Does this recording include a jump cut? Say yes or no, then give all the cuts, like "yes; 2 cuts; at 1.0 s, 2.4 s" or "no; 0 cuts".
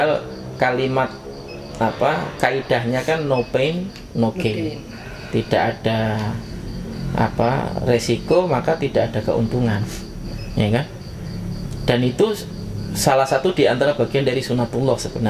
no; 0 cuts